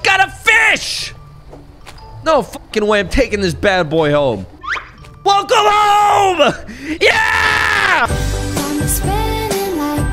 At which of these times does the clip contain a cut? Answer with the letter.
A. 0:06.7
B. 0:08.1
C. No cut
B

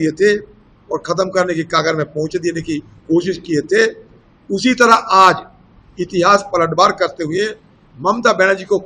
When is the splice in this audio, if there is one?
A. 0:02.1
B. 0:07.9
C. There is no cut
C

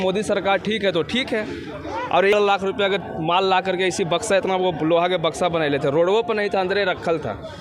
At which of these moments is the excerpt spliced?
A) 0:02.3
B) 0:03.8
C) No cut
A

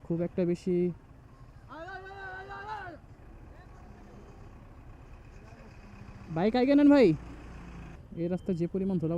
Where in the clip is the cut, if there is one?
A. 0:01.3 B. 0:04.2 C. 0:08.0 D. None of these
C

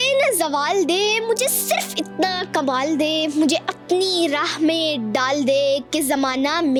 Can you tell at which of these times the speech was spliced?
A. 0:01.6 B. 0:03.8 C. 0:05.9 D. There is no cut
D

